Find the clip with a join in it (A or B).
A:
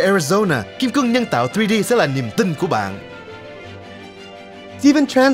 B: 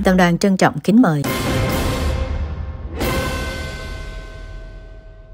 B